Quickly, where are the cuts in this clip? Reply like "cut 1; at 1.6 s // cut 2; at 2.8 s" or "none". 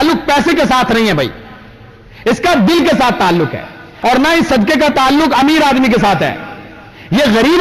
cut 1; at 3.9 s